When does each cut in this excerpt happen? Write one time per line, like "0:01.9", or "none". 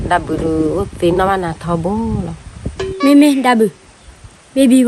0:02.8